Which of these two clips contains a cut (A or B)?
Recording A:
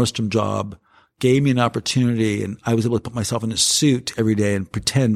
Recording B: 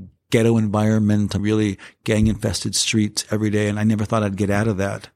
B